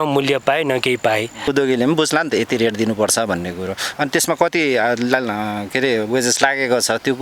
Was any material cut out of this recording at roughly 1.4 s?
yes; 1 cut; at 1.4 s

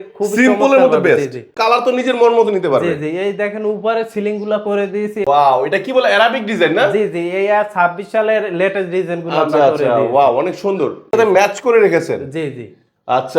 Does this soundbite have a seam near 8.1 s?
no; 3 cuts; at 1.6 s, 5.2 s, 11.1 s

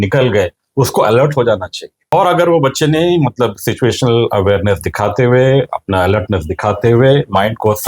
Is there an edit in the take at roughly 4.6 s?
no; 1 cut; at 2.1 s

